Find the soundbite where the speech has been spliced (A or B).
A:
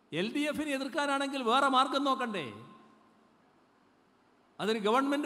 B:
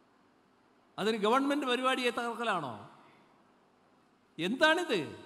B